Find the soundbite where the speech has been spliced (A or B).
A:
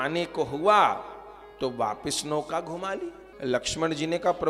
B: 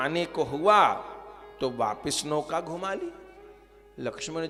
A